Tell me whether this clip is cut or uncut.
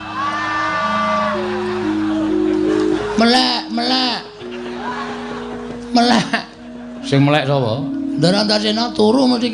cut